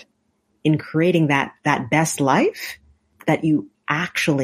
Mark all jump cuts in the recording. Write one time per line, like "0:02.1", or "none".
0:03.1